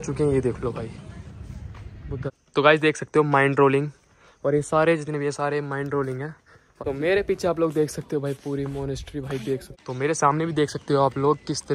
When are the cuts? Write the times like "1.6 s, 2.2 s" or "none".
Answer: 2.6 s, 6.6 s, 9.7 s